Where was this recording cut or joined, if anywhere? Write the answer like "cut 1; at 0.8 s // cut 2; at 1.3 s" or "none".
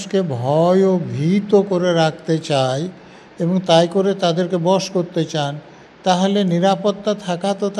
none